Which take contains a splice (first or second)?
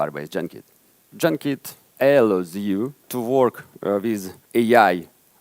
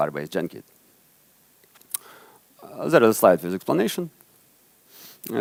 first